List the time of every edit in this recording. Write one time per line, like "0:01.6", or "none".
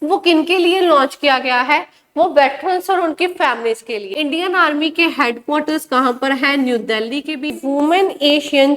0:04.0
0:07.5